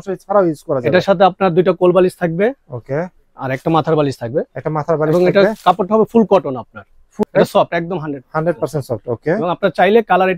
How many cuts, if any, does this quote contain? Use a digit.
1